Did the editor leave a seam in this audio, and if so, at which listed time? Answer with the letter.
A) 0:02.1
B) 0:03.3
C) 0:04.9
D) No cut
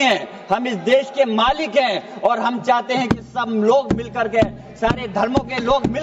D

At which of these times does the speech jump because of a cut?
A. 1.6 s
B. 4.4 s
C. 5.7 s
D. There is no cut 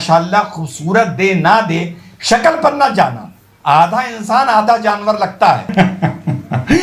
C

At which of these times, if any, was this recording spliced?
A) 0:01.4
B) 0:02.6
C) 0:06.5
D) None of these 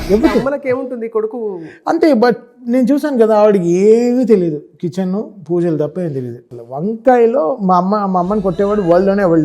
C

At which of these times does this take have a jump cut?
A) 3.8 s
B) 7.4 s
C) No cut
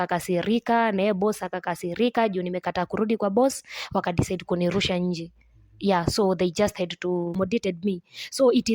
B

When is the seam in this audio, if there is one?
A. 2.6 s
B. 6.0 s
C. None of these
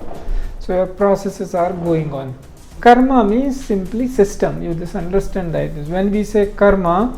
A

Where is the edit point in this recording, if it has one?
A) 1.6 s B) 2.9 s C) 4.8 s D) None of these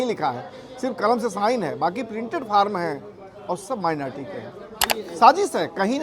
C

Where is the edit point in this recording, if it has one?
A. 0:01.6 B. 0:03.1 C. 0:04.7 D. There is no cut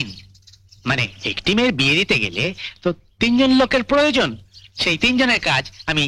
D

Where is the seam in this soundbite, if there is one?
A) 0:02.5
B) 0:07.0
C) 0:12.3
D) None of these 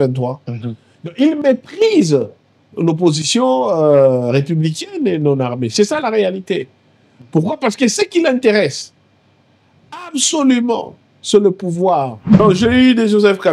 C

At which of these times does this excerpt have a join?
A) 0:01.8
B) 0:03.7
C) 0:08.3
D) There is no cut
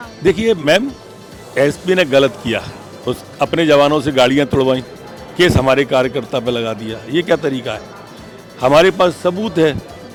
D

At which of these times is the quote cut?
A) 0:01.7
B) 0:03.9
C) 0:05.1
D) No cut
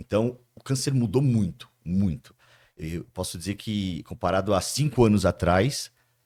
D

